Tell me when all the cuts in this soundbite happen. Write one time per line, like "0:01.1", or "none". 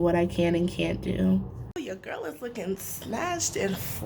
0:01.6